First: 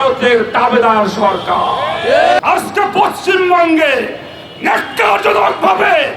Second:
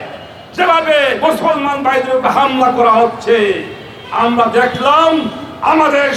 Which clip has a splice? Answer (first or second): first